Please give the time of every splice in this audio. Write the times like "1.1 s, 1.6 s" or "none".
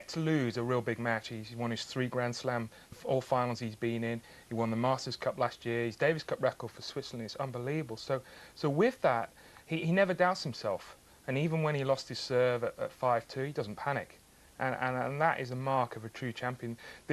15.1 s